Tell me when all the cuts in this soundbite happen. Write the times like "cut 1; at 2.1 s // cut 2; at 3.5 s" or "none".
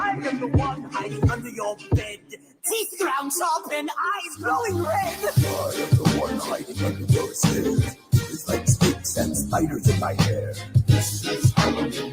cut 1; at 3.5 s // cut 2; at 6.7 s // cut 3; at 10.1 s